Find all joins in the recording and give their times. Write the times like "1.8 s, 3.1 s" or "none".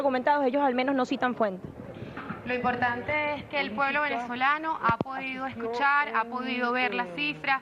none